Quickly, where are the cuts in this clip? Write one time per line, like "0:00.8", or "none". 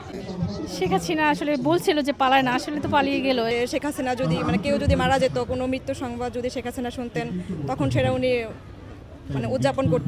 0:03.5